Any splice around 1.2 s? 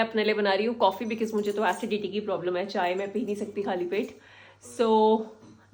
no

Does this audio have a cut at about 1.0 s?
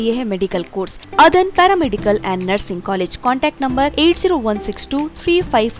yes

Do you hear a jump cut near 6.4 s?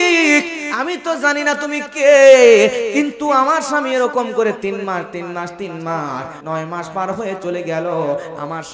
yes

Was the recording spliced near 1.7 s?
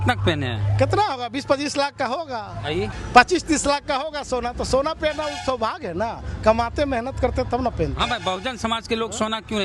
no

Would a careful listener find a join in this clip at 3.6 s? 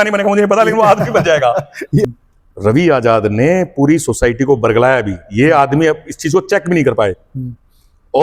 no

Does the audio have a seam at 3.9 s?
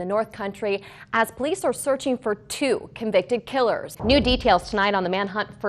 yes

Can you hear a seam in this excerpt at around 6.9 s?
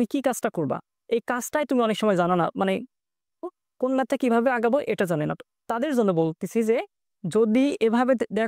no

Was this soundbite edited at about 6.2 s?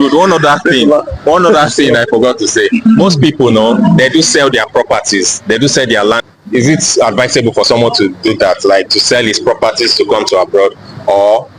yes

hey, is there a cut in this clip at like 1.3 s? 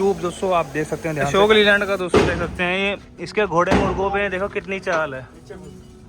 yes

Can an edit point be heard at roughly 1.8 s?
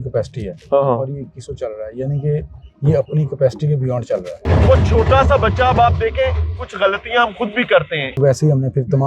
no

